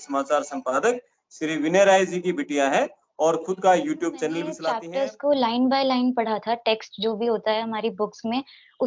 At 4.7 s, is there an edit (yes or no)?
yes